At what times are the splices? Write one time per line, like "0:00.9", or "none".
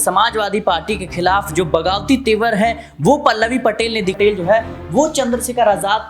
0:04.2